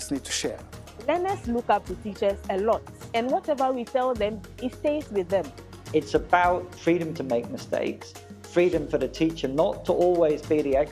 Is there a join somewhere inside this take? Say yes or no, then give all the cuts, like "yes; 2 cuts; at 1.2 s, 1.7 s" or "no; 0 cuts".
no; 0 cuts